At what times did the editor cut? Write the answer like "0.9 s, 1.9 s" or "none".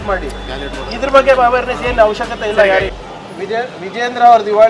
3.0 s